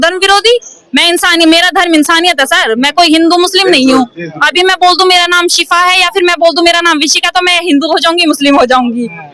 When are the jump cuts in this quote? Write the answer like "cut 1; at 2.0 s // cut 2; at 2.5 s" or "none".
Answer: none